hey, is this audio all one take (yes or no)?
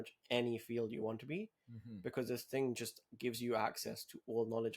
yes